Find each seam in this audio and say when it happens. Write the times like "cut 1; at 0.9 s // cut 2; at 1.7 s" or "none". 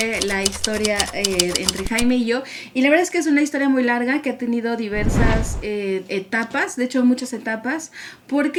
none